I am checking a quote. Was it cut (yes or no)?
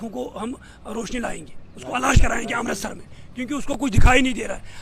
no